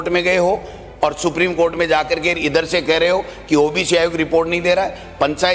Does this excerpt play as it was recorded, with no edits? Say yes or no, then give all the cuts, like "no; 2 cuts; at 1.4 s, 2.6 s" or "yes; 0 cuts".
yes; 0 cuts